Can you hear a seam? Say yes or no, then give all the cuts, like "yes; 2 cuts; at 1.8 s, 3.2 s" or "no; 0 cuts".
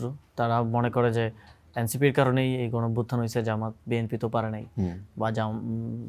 no; 0 cuts